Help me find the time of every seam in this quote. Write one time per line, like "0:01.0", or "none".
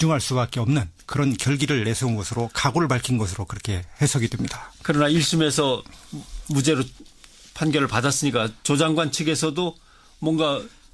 0:03.4